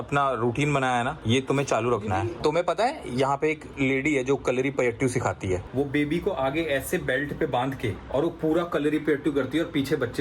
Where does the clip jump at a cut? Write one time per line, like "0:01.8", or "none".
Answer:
0:02.3
0:05.7
0:08.0